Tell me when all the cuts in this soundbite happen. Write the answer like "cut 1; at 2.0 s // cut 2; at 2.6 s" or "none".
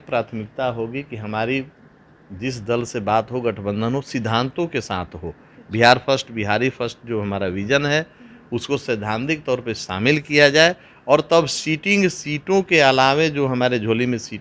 none